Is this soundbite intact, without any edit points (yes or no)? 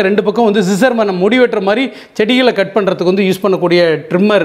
yes